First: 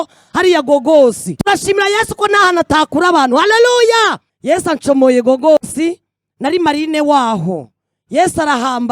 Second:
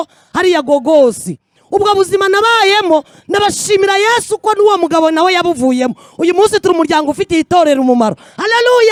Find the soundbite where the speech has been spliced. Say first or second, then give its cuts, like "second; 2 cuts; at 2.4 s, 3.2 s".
first; 2 cuts; at 1.3 s, 4.3 s